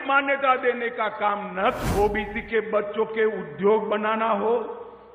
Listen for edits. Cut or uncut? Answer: cut